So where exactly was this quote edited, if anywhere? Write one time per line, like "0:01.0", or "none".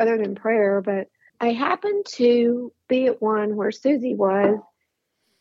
0:01.2